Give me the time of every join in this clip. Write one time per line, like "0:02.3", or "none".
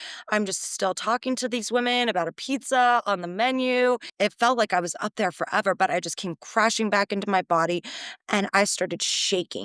0:04.1